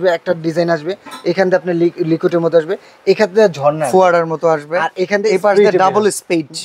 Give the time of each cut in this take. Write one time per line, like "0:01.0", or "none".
none

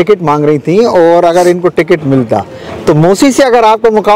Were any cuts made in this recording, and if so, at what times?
none

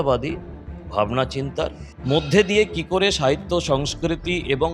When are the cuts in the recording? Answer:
none

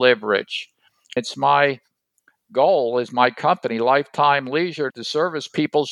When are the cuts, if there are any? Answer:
0:01.2

